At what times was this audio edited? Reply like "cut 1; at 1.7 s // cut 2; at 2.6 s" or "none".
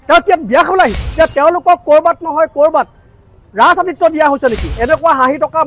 cut 1; at 1.0 s // cut 2; at 4.7 s